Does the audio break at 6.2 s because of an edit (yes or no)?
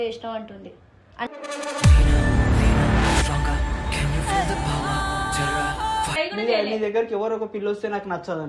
yes